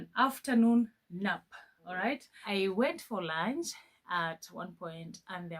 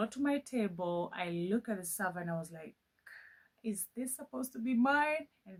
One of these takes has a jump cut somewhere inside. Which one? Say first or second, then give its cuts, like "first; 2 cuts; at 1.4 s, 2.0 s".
first; 1 cut; at 2.2 s